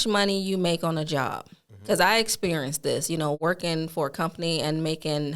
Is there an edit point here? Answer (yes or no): yes